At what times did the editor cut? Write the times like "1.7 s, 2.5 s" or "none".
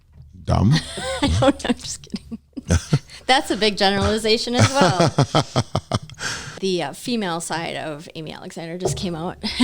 6.4 s